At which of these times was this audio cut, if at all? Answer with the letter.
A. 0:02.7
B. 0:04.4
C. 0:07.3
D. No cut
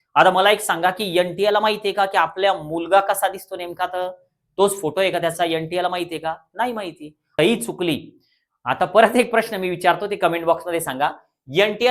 C